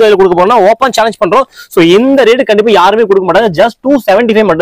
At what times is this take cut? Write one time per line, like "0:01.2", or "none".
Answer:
none